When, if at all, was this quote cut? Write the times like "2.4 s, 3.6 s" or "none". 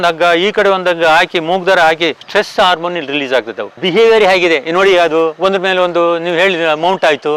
2.2 s, 3.7 s